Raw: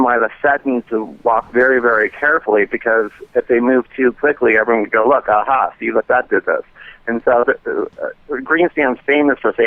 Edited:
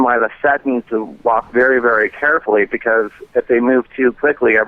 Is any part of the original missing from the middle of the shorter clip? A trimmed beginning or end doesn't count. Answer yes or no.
no